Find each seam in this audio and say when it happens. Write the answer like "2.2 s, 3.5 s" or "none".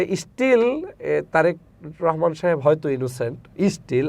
none